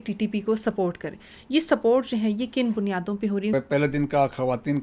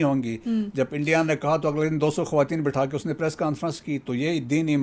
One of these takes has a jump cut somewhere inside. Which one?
first; 1 cut; at 3.5 s

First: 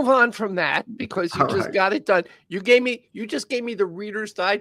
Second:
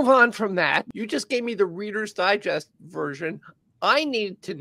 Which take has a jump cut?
second; 1 cut; at 0.9 s

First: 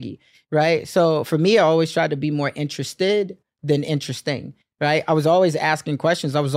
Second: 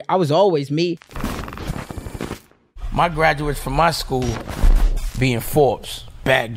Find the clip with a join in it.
second; 1 cut; at 1.0 s

